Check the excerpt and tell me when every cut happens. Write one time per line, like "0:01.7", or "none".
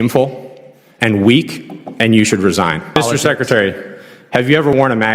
0:03.0